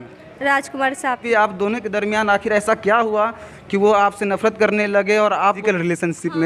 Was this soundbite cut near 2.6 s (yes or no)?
no